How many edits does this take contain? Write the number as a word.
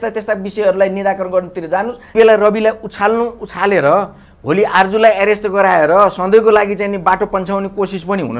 one